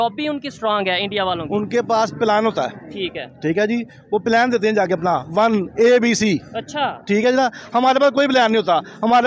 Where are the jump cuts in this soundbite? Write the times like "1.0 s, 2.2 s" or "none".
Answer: none